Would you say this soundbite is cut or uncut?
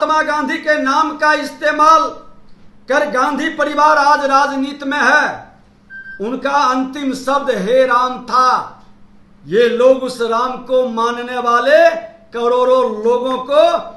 uncut